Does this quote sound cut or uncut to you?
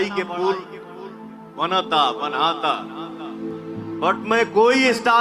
uncut